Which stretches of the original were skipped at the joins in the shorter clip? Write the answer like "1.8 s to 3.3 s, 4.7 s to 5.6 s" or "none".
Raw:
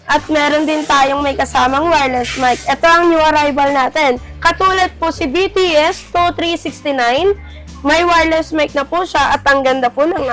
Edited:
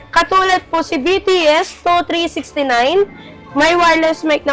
none